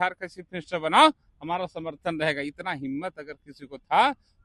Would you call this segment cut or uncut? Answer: uncut